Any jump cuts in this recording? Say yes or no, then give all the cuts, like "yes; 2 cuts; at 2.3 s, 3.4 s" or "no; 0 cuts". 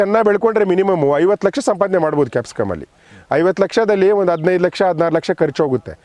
no; 0 cuts